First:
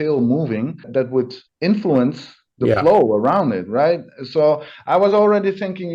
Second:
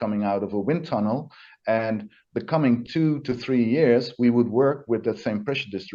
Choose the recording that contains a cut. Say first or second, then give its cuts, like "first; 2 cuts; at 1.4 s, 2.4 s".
first; 1 cut; at 1.2 s